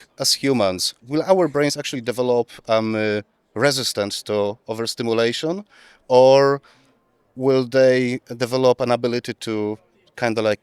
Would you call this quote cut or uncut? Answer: cut